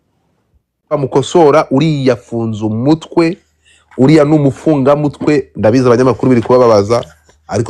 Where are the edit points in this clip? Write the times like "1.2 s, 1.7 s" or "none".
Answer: 0.9 s